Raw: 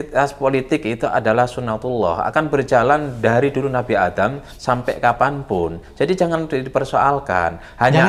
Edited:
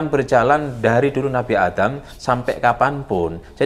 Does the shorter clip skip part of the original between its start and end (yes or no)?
no